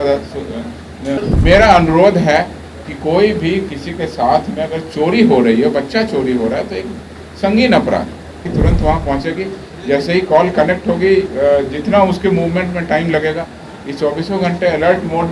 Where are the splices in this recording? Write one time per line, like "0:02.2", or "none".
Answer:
0:01.2
0:08.4